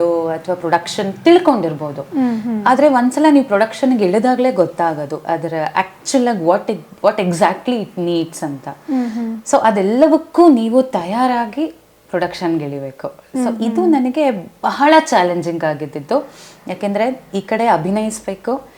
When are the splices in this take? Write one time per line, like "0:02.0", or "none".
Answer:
none

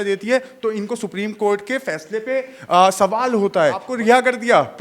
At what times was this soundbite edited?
0:03.9

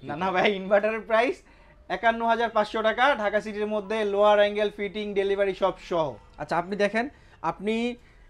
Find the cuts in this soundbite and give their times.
none

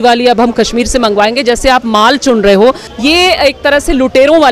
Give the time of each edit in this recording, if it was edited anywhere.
0:02.9

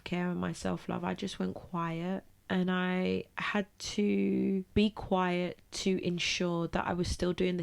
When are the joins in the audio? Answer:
0:02.3
0:04.7

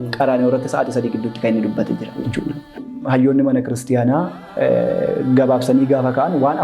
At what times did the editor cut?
0:02.8

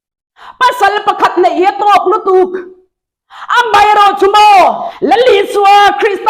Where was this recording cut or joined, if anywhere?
0:04.9

